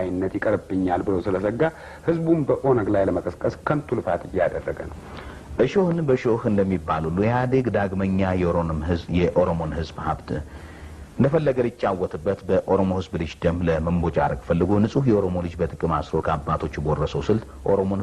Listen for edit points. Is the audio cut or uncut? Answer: uncut